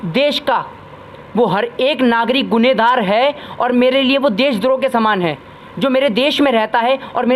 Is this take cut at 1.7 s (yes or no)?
no